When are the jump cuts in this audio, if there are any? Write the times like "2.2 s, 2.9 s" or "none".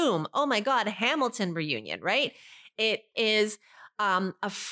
3.1 s